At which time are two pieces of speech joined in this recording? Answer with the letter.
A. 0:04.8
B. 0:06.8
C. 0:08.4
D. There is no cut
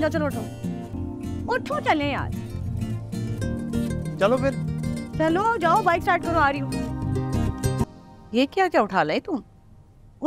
D